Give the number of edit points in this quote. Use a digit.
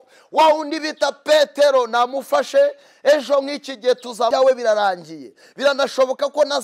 1